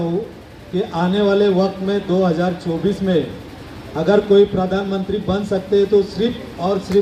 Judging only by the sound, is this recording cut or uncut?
uncut